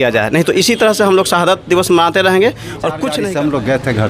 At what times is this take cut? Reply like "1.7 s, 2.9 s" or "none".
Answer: 3.1 s